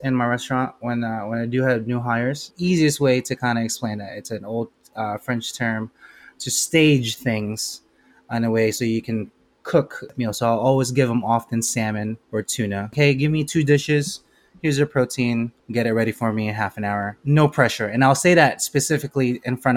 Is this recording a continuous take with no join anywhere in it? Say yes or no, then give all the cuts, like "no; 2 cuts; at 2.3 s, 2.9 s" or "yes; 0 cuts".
no; 5 cuts; at 2.5 s, 10.1 s, 12.8 s, 15.6 s, 17.2 s